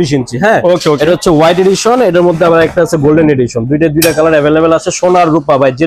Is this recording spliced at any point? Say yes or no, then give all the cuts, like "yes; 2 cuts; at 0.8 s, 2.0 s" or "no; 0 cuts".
no; 0 cuts